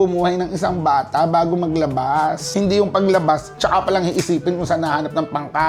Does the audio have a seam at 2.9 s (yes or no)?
no